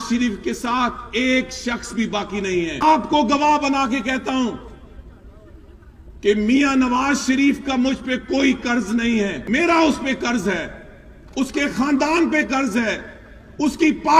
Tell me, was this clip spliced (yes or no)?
yes